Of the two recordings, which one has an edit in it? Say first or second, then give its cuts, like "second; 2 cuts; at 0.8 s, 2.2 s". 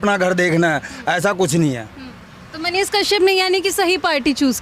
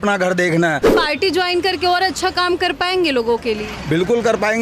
second; 1 cut; at 1.0 s